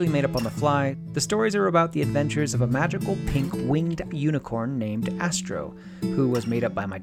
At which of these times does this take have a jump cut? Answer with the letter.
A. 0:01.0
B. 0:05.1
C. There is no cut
A